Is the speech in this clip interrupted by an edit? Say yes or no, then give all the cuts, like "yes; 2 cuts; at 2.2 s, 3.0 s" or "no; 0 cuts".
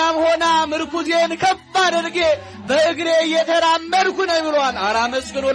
no; 0 cuts